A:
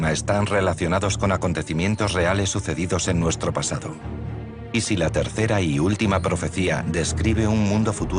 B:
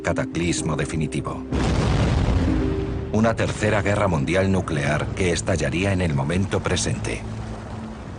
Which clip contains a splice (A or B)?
B